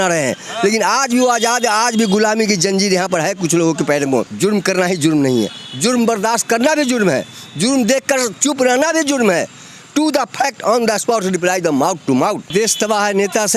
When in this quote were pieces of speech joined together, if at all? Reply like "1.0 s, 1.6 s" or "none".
4.3 s, 12.5 s